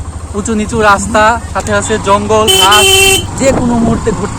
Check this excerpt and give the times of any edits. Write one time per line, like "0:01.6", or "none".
0:03.3